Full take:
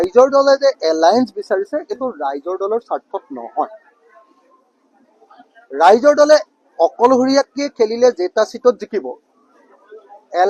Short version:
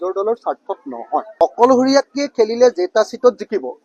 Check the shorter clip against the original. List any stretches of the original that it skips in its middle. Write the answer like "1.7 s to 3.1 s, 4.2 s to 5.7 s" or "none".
3.7 s to 6.7 s

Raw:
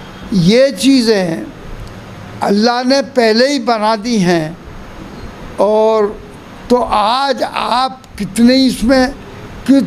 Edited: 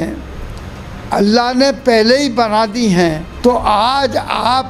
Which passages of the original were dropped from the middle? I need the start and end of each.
4.6 s to 6.5 s

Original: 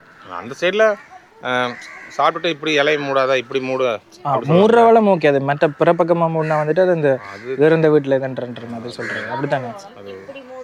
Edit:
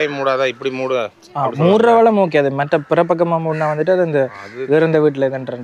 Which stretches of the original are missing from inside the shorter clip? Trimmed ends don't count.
none

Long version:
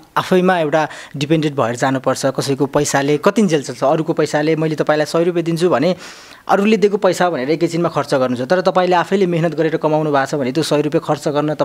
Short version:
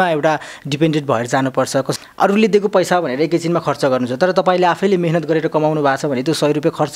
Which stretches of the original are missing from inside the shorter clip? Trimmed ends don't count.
2.4 s to 6.2 s

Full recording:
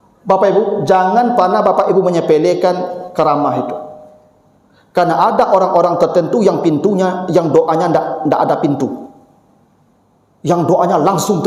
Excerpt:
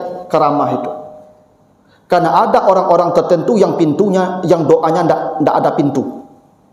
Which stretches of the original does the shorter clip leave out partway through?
none

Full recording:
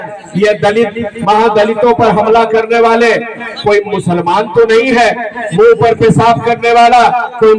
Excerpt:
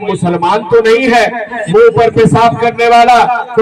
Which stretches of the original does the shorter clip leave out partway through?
none

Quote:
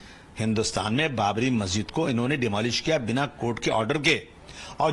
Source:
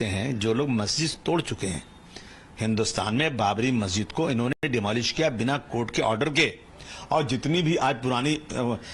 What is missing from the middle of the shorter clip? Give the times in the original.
4.6 s to 4.7 s

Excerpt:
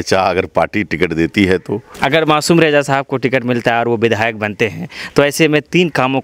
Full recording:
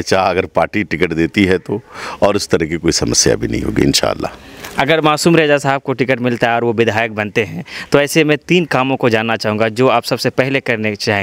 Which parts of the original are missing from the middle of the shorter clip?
1.8 s to 4.6 s

